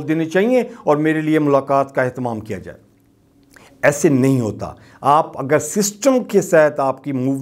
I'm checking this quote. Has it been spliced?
no; 0 cuts

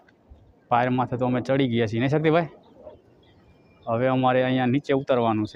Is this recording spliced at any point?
no; 0 cuts

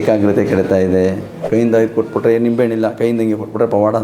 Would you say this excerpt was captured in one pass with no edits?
no; 1 cut; at 1.4 s

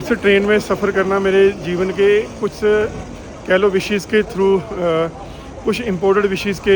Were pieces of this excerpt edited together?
no; 0 cuts

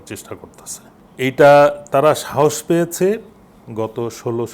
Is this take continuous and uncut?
no; 1 cut; at 1.0 s

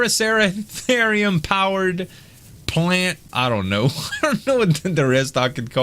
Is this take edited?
yes; 1 cut; at 3.2 s

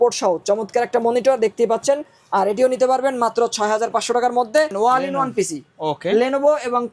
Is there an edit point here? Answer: yes; 1 cut; at 4.7 s

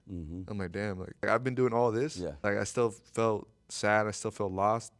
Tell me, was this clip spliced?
yes; 2 cuts; at 1.2 s, 2.4 s

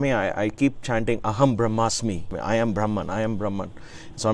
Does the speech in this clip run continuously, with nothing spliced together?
no; 1 cut; at 2.3 s

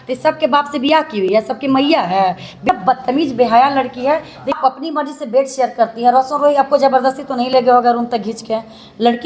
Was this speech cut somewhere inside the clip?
yes; 2 cuts; at 2.6 s, 4.6 s

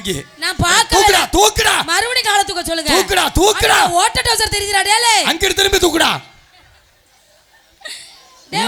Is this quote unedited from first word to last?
yes; 0 cuts

